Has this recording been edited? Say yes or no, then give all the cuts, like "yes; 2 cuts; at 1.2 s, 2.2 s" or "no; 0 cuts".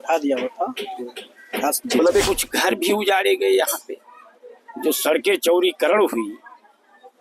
yes; 1 cut; at 2.2 s